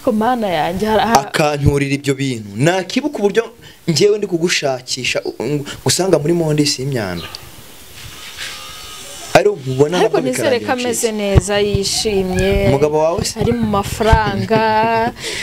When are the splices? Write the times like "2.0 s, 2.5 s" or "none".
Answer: none